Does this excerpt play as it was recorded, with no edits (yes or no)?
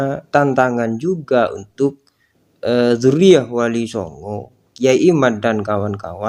yes